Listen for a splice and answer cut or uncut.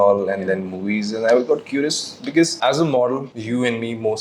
uncut